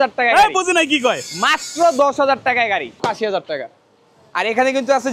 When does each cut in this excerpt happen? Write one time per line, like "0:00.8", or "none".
0:03.0